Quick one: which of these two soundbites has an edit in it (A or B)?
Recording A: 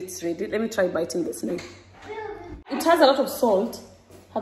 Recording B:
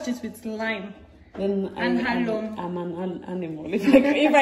A